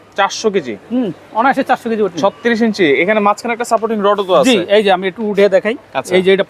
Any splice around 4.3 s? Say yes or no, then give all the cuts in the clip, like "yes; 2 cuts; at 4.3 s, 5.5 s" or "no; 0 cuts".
no; 0 cuts